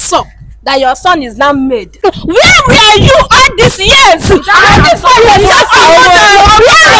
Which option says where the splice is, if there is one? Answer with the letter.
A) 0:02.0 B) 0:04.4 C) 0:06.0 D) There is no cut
A